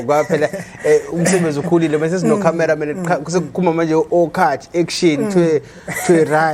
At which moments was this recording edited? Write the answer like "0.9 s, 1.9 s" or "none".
none

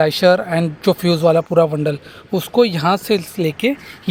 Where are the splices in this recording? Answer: none

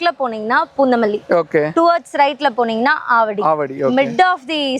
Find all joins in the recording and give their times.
none

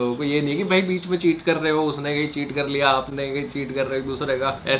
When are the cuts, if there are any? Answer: none

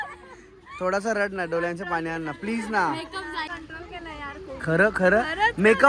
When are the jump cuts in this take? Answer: 3.5 s

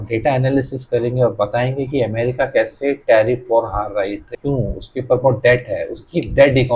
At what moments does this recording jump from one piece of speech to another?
4.3 s

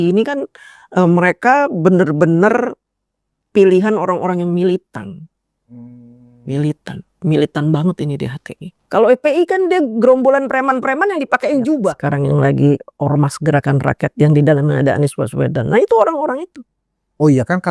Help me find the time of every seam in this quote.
12.0 s

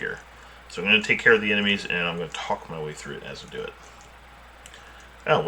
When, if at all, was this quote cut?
4.4 s

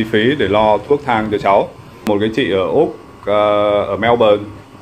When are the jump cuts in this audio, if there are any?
1.9 s

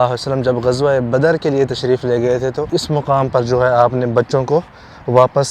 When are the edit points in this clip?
2.7 s

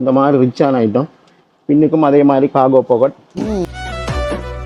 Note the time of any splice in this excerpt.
3.6 s

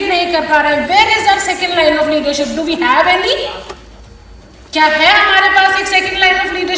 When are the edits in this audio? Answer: 4.0 s

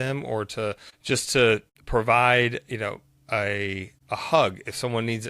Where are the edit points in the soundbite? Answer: 0.9 s, 1.7 s, 3.9 s

